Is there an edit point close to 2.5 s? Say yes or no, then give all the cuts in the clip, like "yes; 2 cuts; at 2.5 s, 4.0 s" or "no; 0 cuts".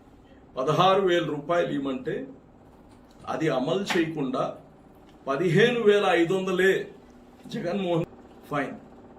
no; 1 cut; at 8.2 s